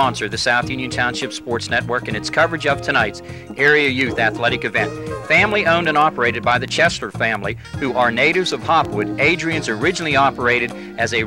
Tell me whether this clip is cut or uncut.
uncut